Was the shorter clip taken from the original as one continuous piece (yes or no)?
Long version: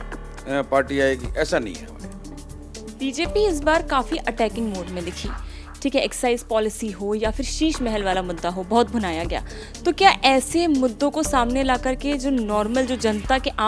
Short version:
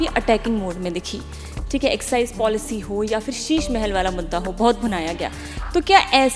yes